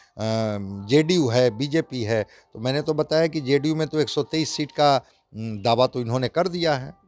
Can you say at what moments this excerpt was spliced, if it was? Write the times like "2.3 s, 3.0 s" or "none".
none